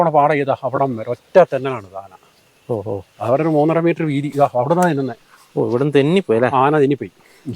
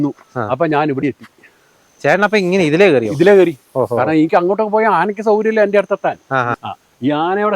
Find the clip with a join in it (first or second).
second